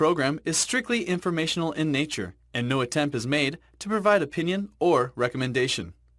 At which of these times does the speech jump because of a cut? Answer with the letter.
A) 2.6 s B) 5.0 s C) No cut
A